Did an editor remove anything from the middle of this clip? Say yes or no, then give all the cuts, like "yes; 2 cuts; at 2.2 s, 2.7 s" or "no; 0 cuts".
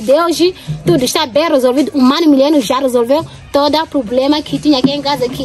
no; 0 cuts